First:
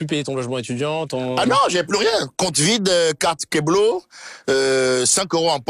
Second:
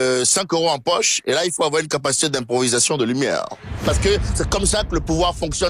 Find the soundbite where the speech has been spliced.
second; 1 cut; at 3.8 s

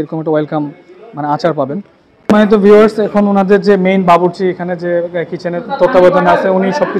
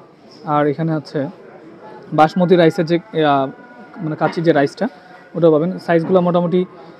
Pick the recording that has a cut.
first; 1 cut; at 2.3 s

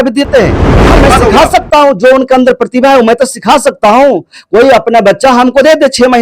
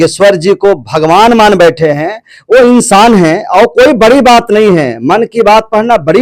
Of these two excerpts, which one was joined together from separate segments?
first; 1 cut; at 0.9 s

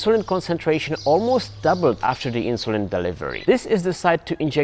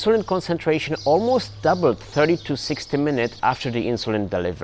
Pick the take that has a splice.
first; 2 cuts; at 2.0 s, 3.4 s

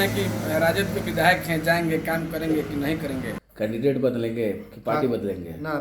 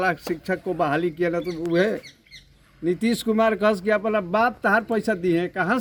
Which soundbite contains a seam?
first; 1 cut; at 3.4 s

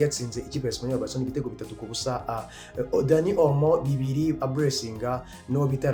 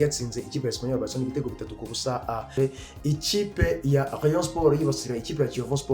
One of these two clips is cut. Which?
second; 1 cut; at 2.5 s

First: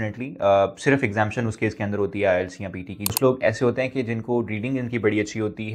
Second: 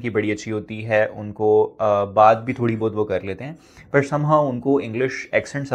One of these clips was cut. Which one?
first; 1 cut; at 3.1 s

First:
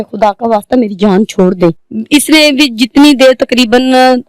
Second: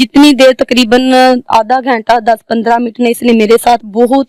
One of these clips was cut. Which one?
first; 1 cut; at 1.9 s

